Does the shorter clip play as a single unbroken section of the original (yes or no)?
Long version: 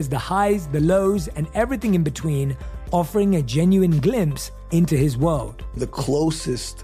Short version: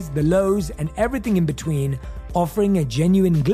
yes